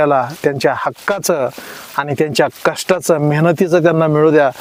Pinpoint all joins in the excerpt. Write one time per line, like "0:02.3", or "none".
none